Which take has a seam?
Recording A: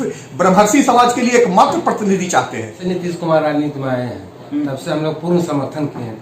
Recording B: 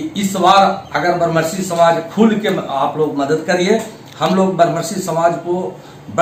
A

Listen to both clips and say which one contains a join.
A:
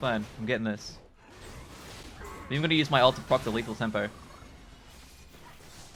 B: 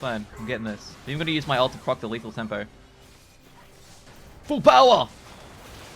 B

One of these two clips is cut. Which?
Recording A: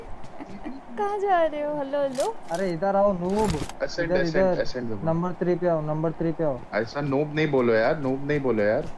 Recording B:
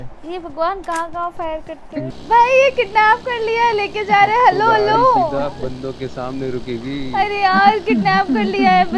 B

